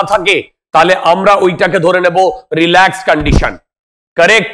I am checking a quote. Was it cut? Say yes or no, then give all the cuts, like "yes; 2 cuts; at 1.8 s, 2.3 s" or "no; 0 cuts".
no; 0 cuts